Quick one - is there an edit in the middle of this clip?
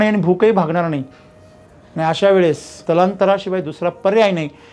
yes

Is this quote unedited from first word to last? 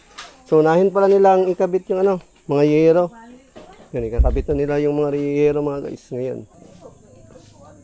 no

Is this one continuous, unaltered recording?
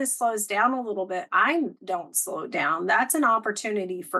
yes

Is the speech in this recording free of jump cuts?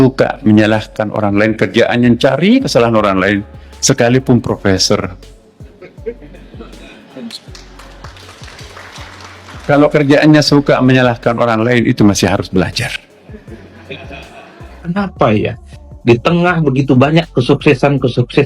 no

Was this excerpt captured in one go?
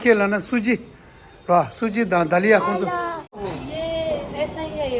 no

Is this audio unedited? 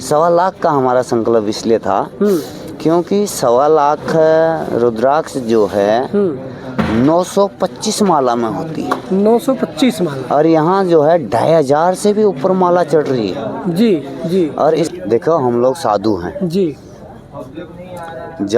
no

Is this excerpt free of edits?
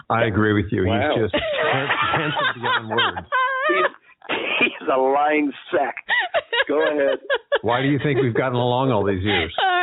yes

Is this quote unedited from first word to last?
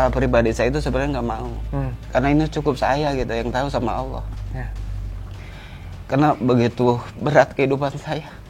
yes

